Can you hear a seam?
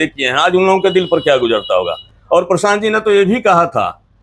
no; 0 cuts

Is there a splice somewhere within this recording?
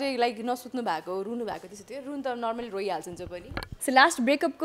yes; 1 cut; at 3.7 s

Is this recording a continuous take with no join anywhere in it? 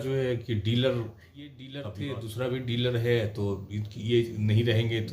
no; 1 cut; at 1.7 s

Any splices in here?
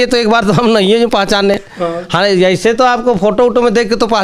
no; 0 cuts

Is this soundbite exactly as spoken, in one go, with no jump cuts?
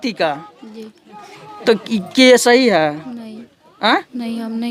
yes; 0 cuts

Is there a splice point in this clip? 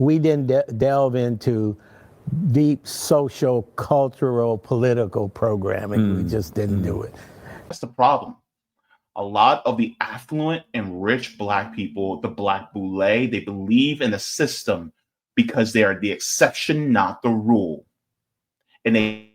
yes; 1 cut; at 7.7 s

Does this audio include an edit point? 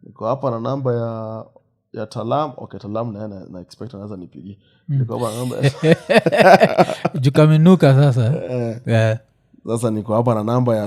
no; 0 cuts

